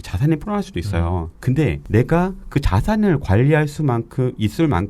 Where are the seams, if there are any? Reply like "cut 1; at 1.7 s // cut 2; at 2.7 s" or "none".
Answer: cut 1; at 1.8 s